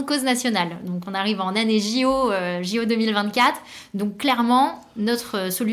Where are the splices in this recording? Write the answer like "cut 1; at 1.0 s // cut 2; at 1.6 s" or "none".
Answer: none